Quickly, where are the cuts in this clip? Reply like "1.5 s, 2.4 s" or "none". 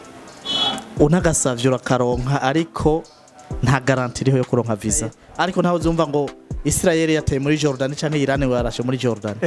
5.2 s

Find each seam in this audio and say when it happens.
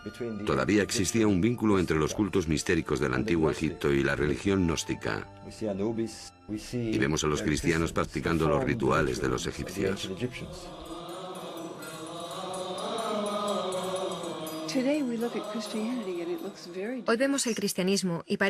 3.9 s

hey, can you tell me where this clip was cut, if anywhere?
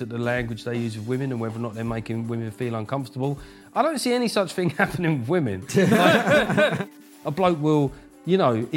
6.8 s

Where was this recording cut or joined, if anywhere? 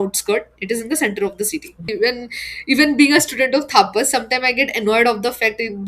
1.8 s

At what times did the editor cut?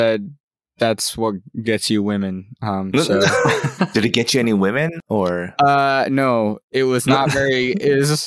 3.9 s, 5.0 s

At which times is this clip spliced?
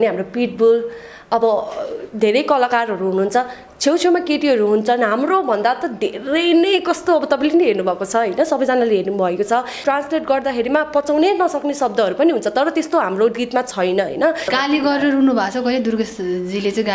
9.8 s, 14.4 s

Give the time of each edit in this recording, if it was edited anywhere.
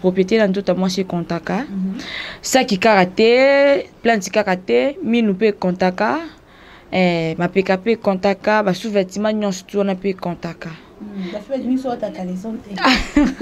none

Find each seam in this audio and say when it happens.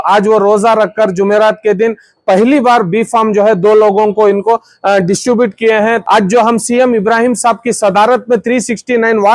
6.0 s

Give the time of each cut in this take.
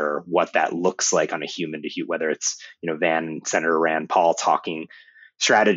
none

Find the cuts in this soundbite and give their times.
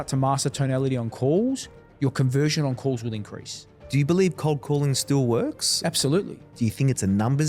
3.8 s

